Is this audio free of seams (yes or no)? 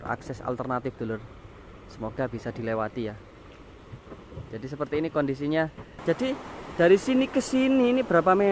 no